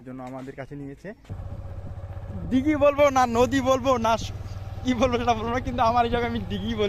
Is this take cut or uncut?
cut